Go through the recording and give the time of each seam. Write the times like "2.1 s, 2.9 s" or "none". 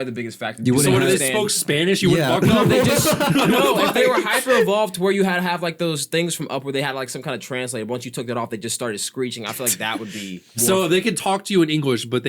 10.5 s

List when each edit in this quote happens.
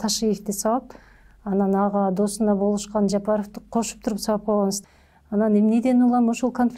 4.8 s

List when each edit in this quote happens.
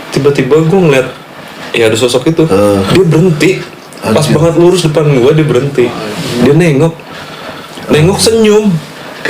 2.9 s, 6.4 s

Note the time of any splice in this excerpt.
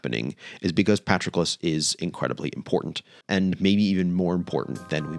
3.2 s

